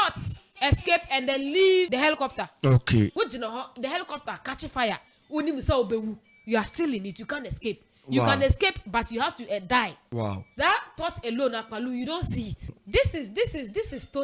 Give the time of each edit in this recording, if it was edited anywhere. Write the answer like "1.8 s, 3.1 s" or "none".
1.9 s, 3.1 s, 10.0 s, 12.8 s